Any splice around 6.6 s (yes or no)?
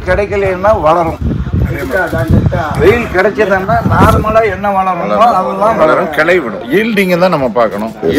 yes